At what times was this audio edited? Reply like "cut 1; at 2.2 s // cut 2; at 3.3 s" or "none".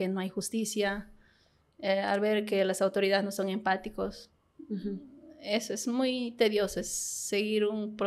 none